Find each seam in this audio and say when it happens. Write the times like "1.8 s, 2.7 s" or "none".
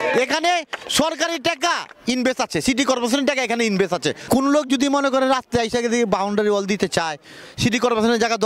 4.2 s